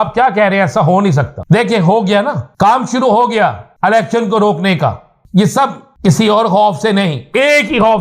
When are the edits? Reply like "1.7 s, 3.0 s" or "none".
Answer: 1.4 s, 2.5 s, 3.7 s, 5.1 s, 5.9 s